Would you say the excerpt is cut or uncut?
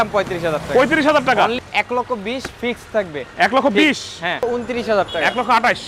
cut